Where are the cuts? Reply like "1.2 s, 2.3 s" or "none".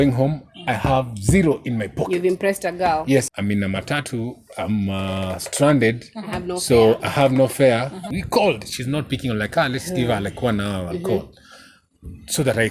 3.3 s, 8.1 s